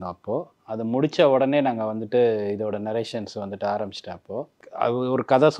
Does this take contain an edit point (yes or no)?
yes